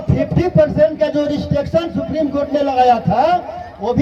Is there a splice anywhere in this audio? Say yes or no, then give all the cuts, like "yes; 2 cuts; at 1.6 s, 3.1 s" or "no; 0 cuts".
no; 0 cuts